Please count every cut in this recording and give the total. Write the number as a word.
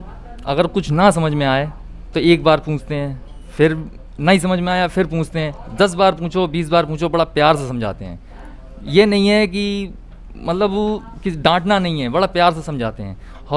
zero